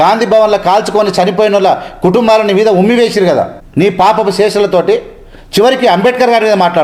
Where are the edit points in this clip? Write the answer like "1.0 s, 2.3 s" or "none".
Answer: 3.6 s

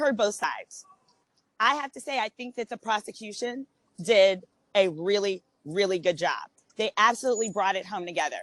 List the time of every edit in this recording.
none

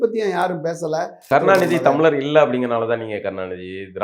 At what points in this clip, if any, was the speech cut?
1.2 s

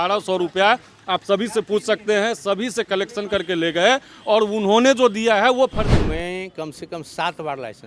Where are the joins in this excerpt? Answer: 5.9 s

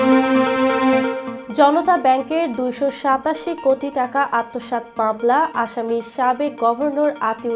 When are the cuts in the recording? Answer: 1.3 s

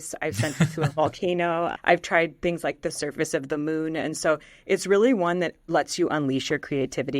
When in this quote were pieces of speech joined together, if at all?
1.7 s

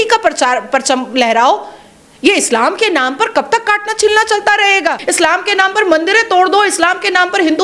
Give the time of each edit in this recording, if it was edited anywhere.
5.0 s

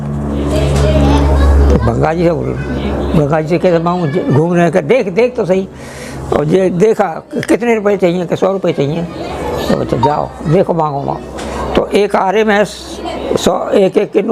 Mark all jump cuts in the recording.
none

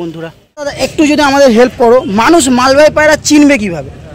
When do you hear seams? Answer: 0.9 s

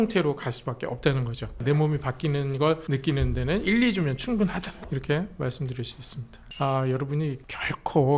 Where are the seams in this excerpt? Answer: 1.6 s, 6.5 s

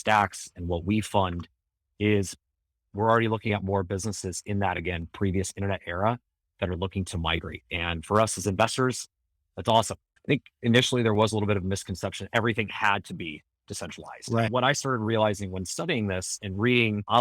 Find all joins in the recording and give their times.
10.1 s, 14.5 s

